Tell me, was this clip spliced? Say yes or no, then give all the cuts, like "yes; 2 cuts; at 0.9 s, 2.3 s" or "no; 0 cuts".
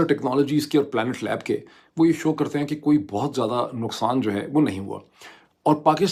no; 0 cuts